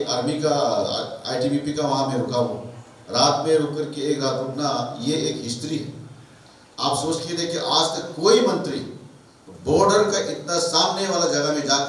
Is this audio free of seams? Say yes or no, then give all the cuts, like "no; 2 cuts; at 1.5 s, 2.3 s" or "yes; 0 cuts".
yes; 0 cuts